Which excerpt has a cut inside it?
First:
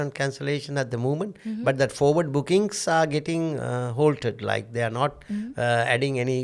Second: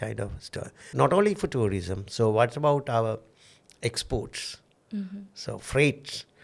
second; 1 cut; at 0.9 s

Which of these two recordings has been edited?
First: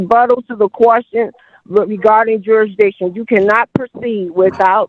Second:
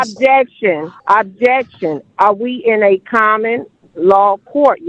second; 1 cut; at 0.9 s

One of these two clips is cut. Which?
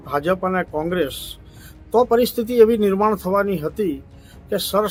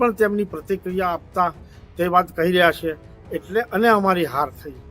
second; 1 cut; at 3.1 s

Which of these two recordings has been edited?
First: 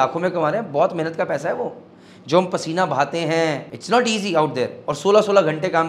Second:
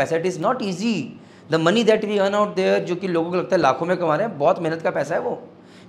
first; 1 cut; at 3.7 s

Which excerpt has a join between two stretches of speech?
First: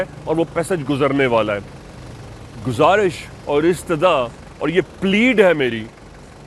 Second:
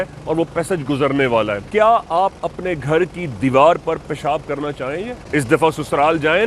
second; 2 cuts; at 1.6 s, 5.2 s

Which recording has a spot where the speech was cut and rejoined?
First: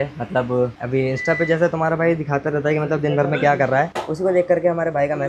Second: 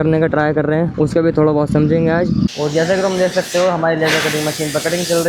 second; 1 cut; at 2.5 s

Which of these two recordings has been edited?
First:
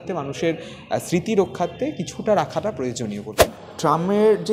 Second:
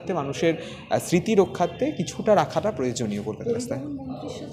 first; 1 cut; at 3.3 s

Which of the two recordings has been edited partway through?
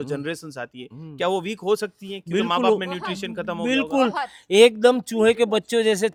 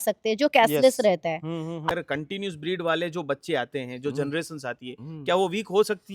second; 1 cut; at 1.9 s

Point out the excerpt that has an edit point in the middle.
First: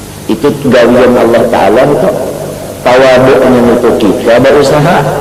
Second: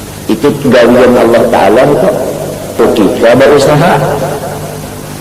second; 1 cut; at 2.8 s

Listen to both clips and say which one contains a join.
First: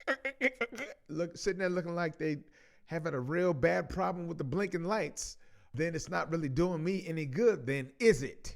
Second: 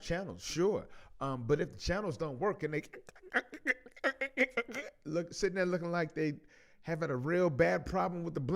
first; 1 cut; at 5.6 s

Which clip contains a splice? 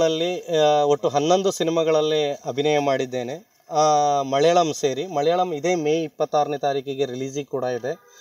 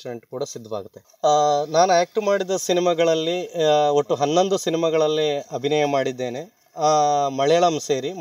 second; 1 cut; at 1.0 s

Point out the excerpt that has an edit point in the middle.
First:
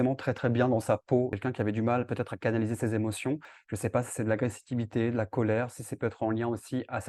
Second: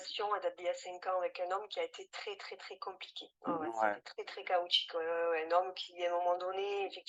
first; 2 cuts; at 1.3 s, 3.6 s

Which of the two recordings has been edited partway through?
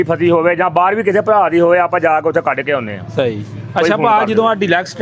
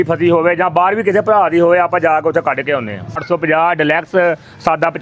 second; 1 cut; at 3.2 s

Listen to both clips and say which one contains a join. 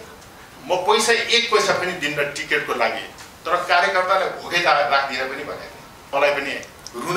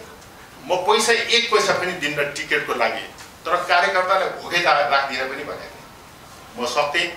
first; 1 cut; at 6.1 s

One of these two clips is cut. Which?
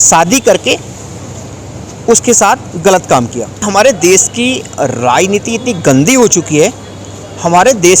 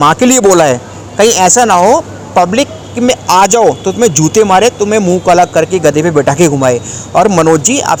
first; 1 cut; at 3.6 s

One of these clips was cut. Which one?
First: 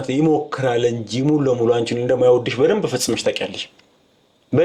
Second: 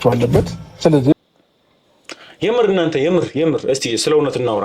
second; 1 cut; at 1.1 s

